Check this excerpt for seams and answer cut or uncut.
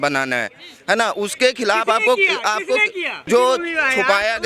cut